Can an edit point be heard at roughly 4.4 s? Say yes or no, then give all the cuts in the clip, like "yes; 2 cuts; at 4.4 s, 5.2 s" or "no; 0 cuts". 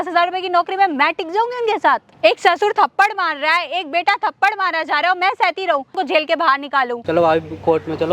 no; 2 cuts; at 2.1 s, 5.9 s